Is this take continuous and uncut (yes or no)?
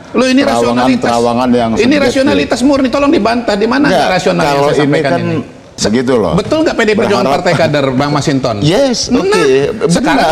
no